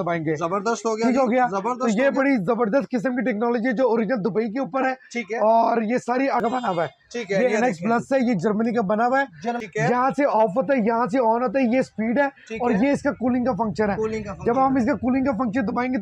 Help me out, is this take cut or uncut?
cut